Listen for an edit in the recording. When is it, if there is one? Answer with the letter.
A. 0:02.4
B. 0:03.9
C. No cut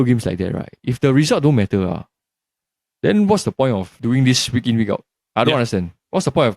B